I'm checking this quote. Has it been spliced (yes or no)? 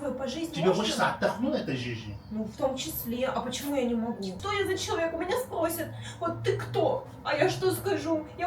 yes